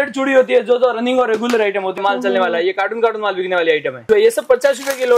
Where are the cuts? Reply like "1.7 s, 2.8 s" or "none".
2.0 s, 4.0 s

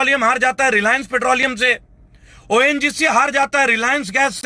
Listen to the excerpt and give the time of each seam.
none

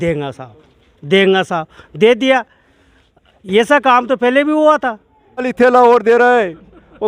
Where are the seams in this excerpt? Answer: 5.5 s

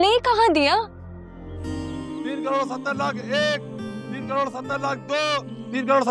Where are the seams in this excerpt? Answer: 1.5 s

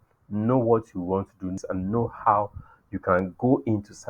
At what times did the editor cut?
1.6 s

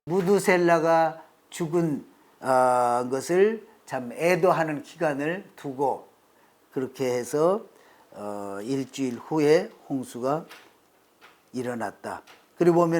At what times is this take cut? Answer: 6.3 s

